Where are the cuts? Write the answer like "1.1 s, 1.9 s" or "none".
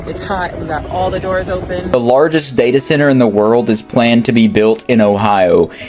1.9 s